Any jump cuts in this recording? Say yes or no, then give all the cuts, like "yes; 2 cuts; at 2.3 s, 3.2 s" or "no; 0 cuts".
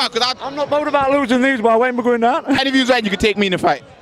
yes; 1 cut; at 2.6 s